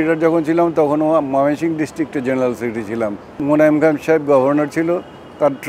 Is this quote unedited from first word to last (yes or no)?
no